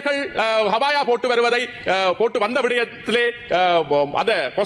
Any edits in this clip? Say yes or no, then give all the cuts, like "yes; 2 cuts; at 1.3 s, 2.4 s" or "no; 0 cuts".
no; 0 cuts